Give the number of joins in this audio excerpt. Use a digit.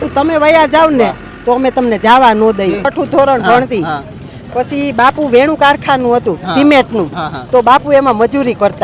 1